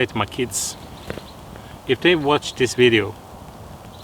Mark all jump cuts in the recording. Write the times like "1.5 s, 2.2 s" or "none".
none